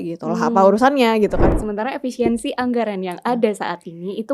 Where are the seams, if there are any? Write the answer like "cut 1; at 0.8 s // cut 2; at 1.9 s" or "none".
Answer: cut 1; at 1.5 s